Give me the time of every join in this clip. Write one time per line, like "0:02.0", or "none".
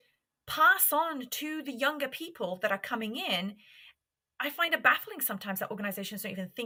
none